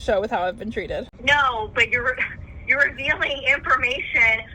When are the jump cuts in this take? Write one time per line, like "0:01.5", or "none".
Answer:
0:01.1